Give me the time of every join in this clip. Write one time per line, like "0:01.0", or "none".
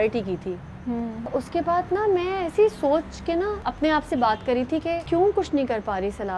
0:01.4
0:03.6
0:05.0